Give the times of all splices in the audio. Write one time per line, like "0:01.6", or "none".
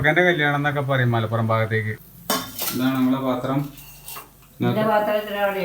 0:02.0

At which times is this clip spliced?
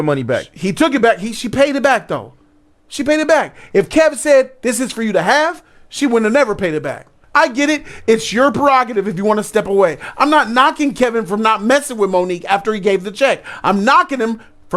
0:07.2

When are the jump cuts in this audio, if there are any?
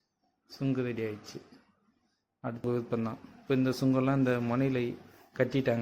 0:02.6

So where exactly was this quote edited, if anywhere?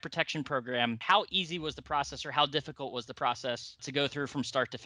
0:01.0
0:03.9

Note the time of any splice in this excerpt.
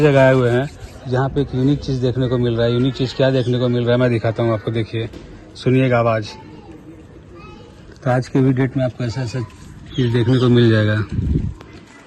none

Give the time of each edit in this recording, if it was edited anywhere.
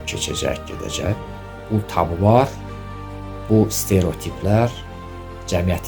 0:01.2

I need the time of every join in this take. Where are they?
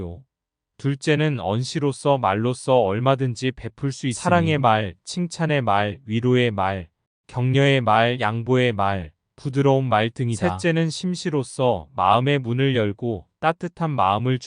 0:10.4

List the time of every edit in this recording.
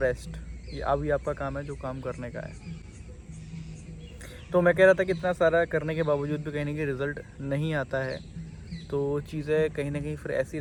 none

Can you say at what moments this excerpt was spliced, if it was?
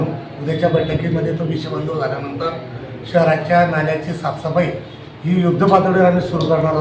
none

